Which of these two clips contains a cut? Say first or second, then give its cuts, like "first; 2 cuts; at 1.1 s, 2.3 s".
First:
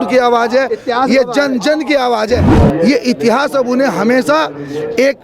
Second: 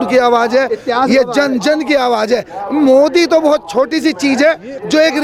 first; 1 cut; at 2.5 s